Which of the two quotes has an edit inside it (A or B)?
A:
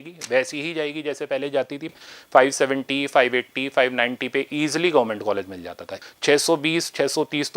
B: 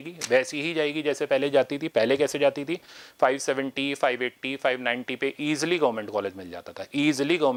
A